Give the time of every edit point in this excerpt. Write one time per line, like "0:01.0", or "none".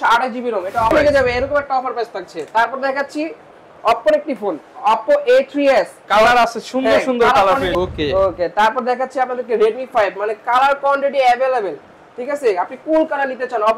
0:00.9
0:07.7